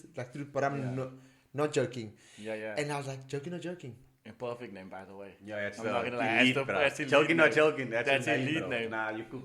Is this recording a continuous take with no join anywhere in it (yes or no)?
yes